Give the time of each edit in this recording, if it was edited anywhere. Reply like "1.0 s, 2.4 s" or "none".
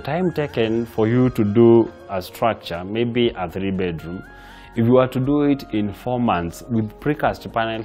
2.2 s